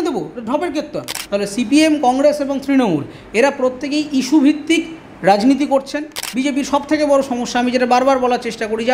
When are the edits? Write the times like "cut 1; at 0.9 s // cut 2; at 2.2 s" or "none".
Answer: cut 1; at 1.1 s // cut 2; at 6.2 s